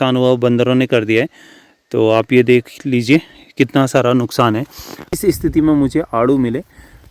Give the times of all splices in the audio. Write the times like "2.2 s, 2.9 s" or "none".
5.0 s